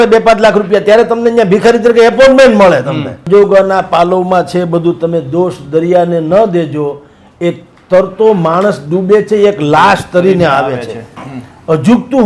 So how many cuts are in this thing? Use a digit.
1